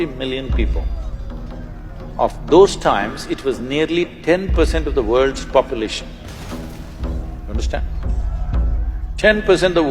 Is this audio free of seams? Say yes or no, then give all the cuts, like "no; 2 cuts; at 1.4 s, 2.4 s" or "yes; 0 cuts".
yes; 0 cuts